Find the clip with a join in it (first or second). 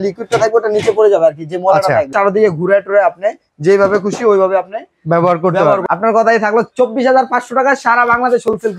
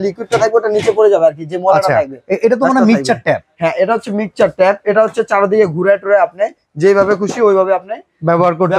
first